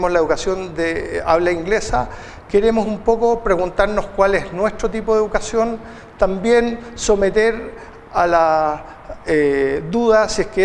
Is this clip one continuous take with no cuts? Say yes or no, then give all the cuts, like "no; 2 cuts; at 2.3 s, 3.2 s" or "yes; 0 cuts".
no; 1 cut; at 6.1 s